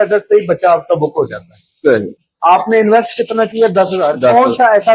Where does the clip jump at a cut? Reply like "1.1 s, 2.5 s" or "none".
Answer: 2.1 s